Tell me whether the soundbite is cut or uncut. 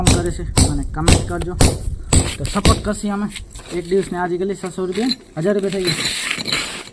uncut